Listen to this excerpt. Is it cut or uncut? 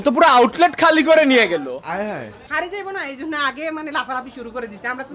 cut